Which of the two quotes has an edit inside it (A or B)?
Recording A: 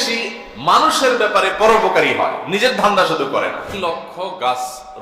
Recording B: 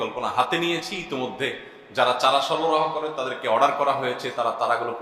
A